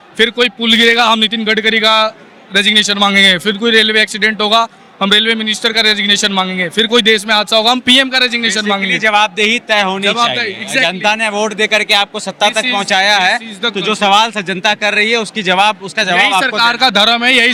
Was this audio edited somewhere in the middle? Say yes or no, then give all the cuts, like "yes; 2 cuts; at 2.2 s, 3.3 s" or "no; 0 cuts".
no; 0 cuts